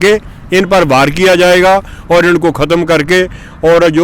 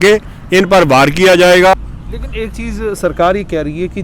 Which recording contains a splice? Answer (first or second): second